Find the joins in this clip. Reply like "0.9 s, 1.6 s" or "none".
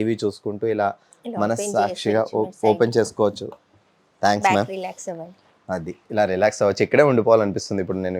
none

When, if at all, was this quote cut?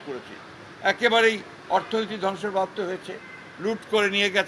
none

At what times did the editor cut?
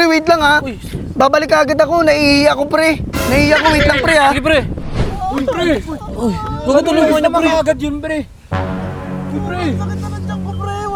none

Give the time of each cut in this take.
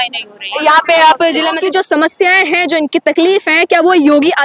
1.6 s

